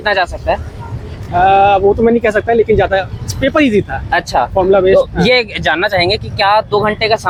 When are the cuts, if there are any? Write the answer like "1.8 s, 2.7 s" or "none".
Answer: none